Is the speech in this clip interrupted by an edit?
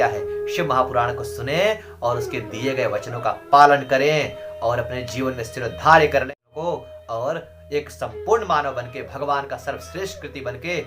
yes; 1 cut; at 6.3 s

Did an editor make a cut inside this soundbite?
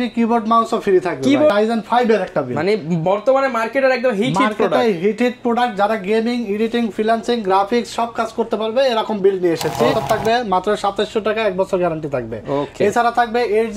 yes; 2 cuts; at 1.5 s, 10.0 s

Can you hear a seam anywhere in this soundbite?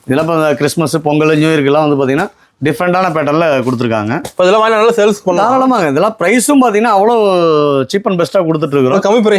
no; 0 cuts

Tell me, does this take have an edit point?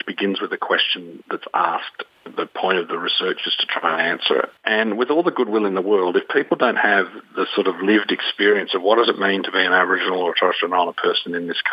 yes; 1 cut; at 2.0 s

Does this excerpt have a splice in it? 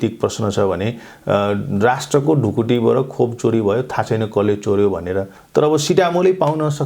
yes; 1 cut; at 5.3 s

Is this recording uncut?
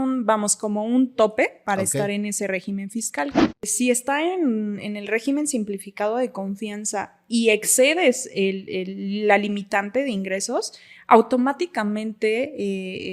no; 1 cut; at 3.6 s

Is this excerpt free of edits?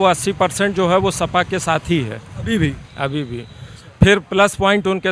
yes; 0 cuts

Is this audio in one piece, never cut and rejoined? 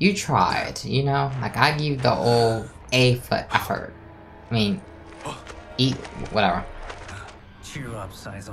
no; 1 cut; at 7.4 s

